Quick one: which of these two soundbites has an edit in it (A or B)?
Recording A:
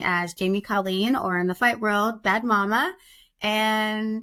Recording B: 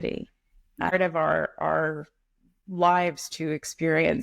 B